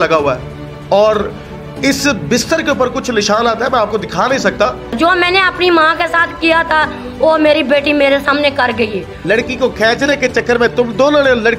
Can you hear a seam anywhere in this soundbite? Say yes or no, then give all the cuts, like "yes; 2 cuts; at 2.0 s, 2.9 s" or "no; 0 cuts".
yes; 2 cuts; at 4.9 s, 9.2 s